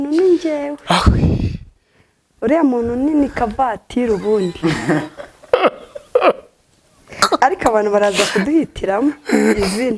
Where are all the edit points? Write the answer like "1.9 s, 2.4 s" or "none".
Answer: none